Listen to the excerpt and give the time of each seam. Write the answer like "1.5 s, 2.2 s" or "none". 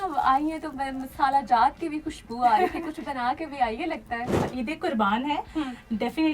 4.5 s